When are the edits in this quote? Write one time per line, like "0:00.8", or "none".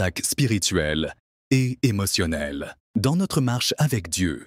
0:02.8